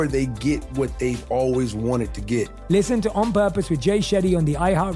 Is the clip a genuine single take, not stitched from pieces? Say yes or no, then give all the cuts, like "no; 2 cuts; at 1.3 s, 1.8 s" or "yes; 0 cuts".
no; 1 cut; at 2.5 s